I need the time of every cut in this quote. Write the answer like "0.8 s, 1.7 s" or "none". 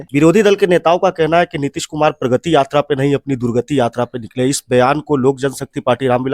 none